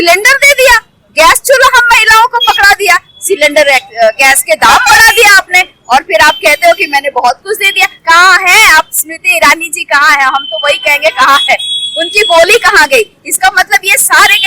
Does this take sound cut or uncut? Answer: cut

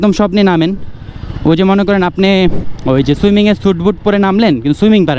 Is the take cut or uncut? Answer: uncut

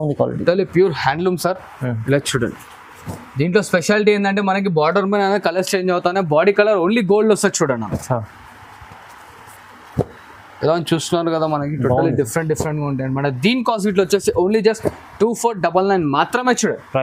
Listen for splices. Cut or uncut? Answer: uncut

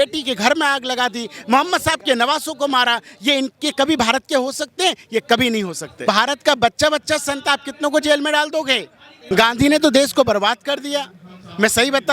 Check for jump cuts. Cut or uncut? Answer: cut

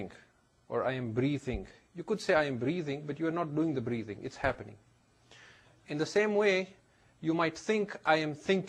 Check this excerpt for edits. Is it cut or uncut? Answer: uncut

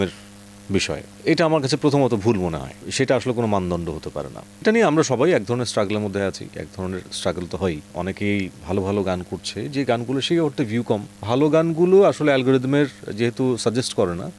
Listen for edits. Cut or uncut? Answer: cut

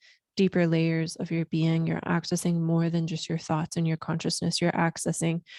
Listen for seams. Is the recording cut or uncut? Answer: uncut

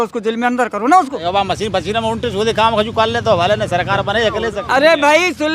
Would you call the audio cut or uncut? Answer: cut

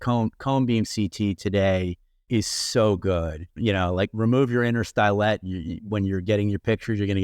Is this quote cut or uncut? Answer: cut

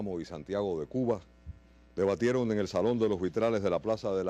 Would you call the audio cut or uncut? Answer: cut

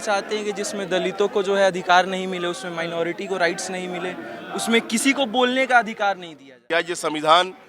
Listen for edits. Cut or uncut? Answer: cut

